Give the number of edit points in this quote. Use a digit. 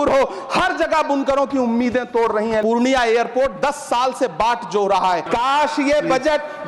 2